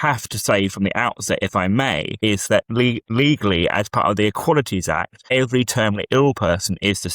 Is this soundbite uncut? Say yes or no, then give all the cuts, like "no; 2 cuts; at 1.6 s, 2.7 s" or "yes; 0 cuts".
no; 3 cuts; at 2.1 s, 3.1 s, 5.1 s